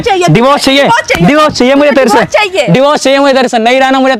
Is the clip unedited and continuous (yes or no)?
yes